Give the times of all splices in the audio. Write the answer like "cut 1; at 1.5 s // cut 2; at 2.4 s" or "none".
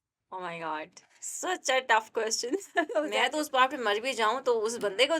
cut 1; at 3.1 s

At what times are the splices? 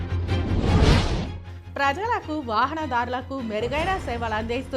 cut 1; at 1.4 s

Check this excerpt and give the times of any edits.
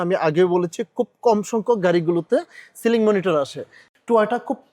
cut 1; at 3.8 s

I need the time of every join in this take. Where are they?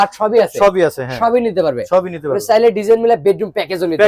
none

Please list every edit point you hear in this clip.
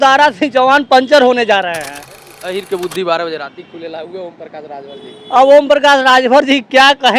cut 1; at 2.3 s

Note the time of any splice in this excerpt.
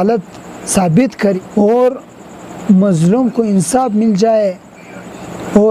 cut 1; at 1.4 s

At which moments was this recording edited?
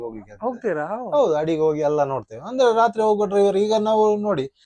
none

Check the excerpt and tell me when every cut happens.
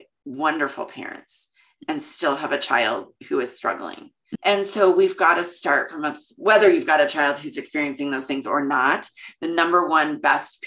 cut 1; at 4.2 s

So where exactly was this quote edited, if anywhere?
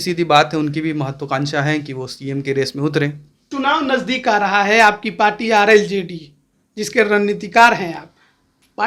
cut 1; at 3.5 s

